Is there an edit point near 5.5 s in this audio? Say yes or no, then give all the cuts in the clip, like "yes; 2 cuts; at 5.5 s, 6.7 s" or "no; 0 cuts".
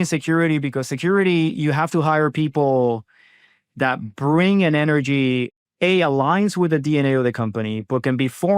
yes; 1 cut; at 5.5 s